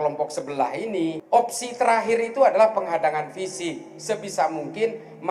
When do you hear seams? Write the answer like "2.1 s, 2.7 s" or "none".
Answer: 1.2 s